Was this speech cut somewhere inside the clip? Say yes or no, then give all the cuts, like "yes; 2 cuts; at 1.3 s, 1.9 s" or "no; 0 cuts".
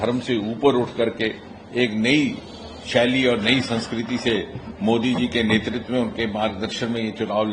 no; 0 cuts